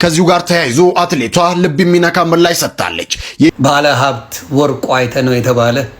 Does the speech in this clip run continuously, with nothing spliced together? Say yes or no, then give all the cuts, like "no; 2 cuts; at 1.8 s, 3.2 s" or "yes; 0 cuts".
no; 1 cut; at 3.5 s